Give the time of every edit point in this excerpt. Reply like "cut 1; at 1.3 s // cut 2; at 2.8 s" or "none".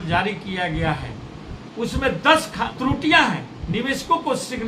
cut 1; at 2.7 s // cut 2; at 3.5 s